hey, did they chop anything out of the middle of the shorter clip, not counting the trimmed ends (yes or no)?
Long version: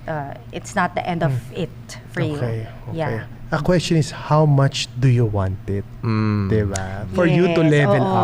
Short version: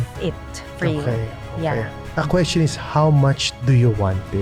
no